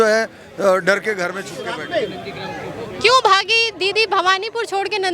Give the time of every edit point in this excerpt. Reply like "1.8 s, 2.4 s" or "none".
1.5 s

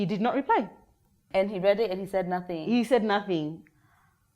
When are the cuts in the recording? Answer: 1.2 s

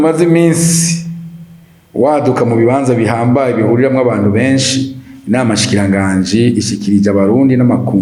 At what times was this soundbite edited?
none

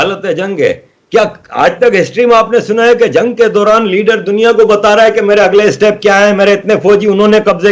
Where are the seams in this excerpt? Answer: none

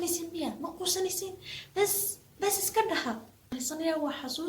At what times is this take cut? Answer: 3.5 s

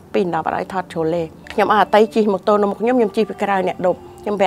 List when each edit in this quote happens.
1.4 s

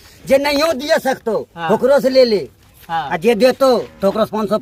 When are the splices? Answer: none

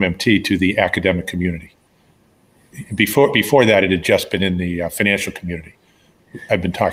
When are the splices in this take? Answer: none

